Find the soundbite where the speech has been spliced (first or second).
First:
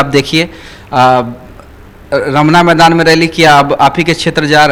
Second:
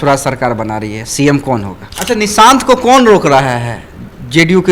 second